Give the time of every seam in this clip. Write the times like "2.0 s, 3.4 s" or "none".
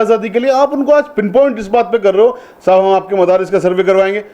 none